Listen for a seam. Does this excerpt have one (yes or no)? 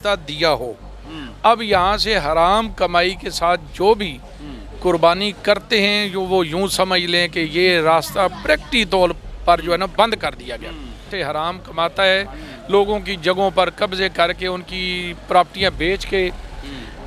yes